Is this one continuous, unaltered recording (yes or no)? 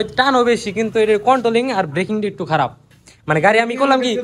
yes